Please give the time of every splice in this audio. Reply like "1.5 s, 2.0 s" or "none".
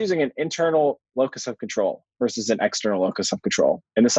none